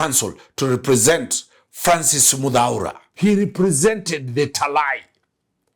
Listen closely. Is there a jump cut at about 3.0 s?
yes; 1 cut; at 3.0 s

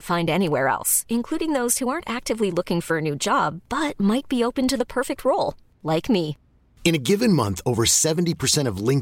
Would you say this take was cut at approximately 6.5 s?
no; 0 cuts

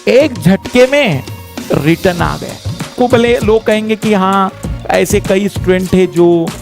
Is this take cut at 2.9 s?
yes; 1 cut; at 2.9 s

